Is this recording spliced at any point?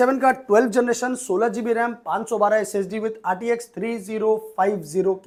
no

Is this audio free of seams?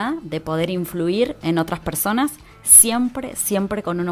yes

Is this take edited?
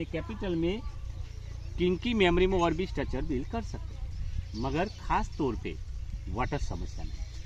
no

